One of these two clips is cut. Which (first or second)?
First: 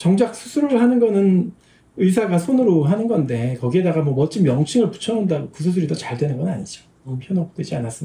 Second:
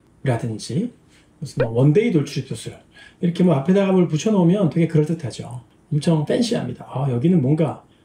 first